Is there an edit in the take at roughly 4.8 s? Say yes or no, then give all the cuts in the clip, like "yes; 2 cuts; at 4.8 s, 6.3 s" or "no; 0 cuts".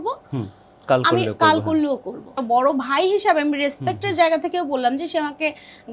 no; 1 cut; at 2.3 s